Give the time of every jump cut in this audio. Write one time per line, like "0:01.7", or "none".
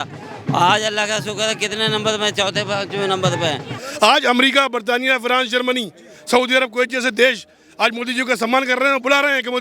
0:03.8